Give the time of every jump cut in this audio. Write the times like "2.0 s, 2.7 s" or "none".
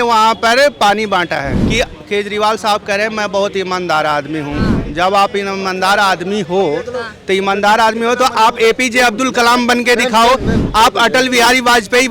1.5 s